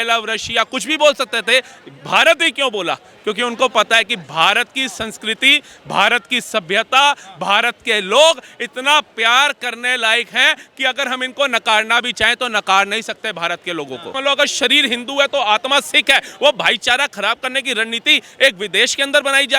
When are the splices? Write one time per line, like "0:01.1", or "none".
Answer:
0:14.1